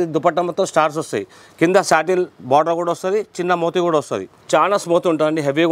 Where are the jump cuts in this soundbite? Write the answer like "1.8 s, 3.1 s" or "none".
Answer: 4.3 s